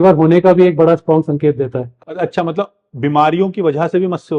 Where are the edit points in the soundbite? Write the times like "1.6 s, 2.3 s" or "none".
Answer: 2.0 s